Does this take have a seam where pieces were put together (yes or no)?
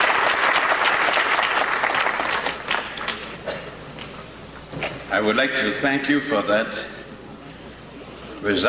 yes